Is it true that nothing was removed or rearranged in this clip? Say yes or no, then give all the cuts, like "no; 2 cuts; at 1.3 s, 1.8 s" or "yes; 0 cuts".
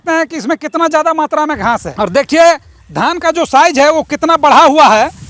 no; 1 cut; at 1.9 s